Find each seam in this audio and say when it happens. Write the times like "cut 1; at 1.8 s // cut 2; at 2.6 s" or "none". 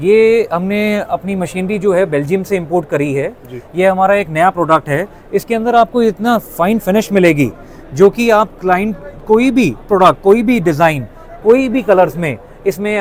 none